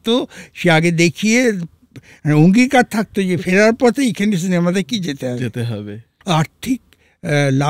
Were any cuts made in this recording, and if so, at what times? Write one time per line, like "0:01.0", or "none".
0:06.1

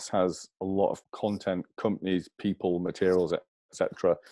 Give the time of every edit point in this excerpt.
0:01.1

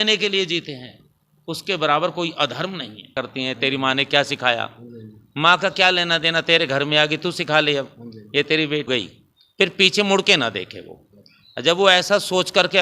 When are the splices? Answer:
0:03.1
0:08.9

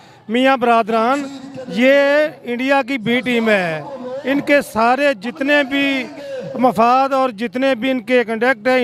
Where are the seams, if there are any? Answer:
none

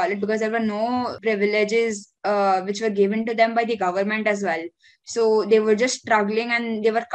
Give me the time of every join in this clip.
0:01.2

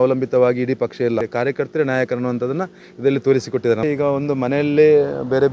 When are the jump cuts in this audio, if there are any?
0:01.3
0:03.8

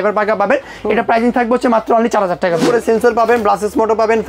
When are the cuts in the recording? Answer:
0:02.6

